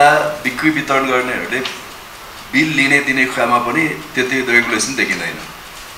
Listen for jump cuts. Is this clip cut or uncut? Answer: uncut